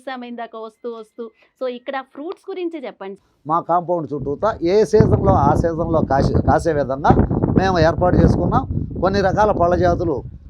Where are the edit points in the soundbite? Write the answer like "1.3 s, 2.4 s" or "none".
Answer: 3.3 s